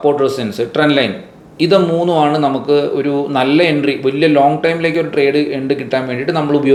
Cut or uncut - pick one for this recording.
uncut